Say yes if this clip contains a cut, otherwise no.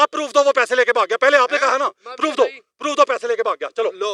no